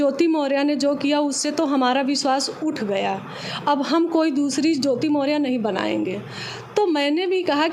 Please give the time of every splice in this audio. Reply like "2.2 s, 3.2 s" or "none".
none

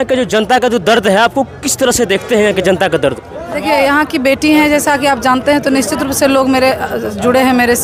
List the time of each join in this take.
none

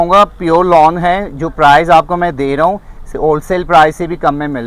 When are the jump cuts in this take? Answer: none

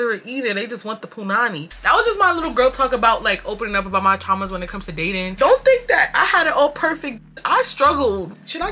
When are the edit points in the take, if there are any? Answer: none

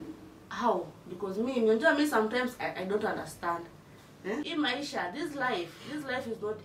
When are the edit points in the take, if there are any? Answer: 4.4 s

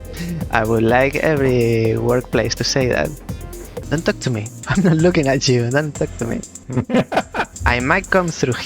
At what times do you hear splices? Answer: 3.8 s, 4.6 s, 6.5 s, 7.5 s

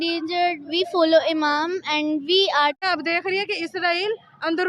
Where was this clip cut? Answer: 2.8 s

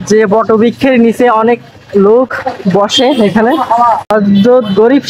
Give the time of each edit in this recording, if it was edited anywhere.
4.1 s

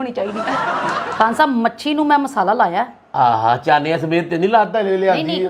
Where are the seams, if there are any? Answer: 1.0 s

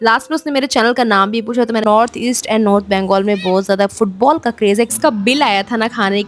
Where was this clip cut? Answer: 1.8 s, 4.9 s

